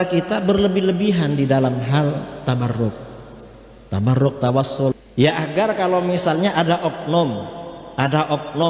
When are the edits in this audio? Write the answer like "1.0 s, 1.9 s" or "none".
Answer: 4.9 s